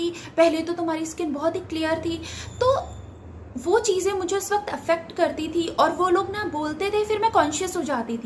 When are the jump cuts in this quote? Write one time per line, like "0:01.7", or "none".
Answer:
none